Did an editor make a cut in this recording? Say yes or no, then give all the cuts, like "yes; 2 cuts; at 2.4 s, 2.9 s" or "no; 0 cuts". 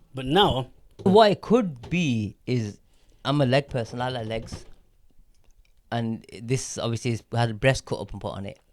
yes; 1 cut; at 1.1 s